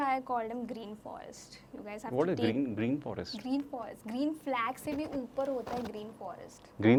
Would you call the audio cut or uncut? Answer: uncut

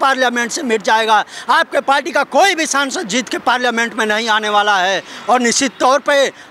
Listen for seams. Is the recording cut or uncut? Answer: uncut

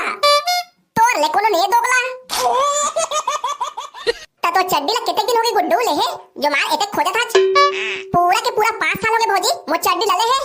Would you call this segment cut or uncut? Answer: cut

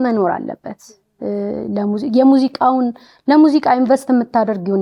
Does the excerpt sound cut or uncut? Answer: uncut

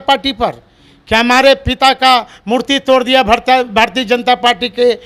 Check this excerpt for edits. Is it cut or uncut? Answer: uncut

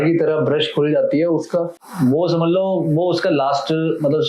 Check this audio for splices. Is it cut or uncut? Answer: uncut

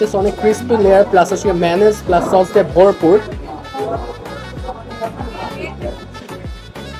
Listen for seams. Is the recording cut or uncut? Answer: uncut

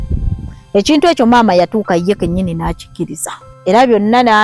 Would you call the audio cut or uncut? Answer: cut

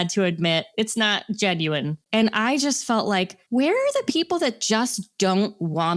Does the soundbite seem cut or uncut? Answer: cut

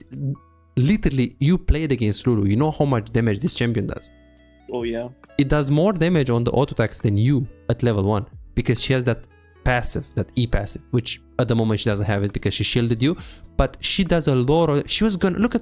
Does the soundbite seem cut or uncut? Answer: uncut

